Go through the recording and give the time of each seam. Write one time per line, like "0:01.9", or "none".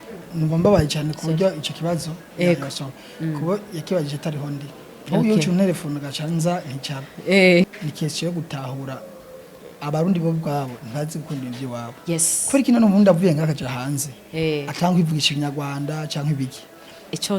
0:07.7